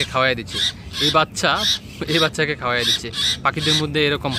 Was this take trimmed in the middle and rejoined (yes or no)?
no